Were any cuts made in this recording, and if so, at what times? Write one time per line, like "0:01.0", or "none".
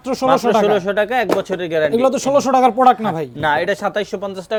none